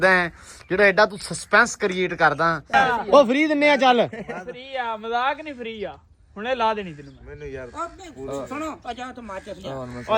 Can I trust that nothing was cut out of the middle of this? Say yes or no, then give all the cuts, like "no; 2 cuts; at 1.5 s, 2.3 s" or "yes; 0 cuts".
no; 1 cut; at 2.7 s